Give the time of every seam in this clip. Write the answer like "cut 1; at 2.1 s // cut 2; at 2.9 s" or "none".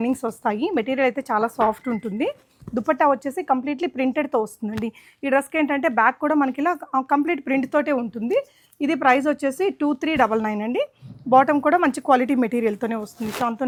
none